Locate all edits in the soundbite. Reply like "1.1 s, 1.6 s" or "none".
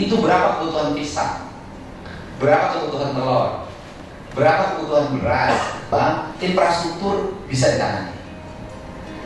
5.7 s